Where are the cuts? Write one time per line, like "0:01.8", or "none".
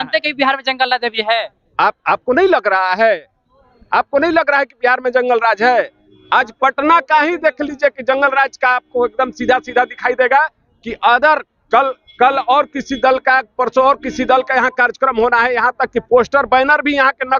none